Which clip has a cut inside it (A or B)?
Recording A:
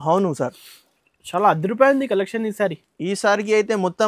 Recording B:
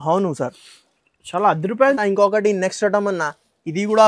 B